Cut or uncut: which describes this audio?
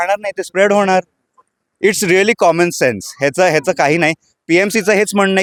uncut